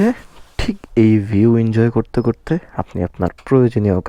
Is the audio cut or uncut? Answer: uncut